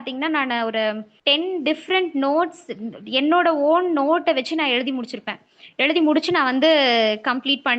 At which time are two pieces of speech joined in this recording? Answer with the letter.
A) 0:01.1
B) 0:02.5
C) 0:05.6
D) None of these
A